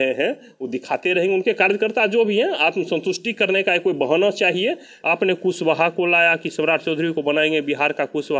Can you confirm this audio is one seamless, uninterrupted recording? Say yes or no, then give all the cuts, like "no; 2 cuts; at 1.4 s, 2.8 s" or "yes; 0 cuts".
no; 1 cut; at 5.0 s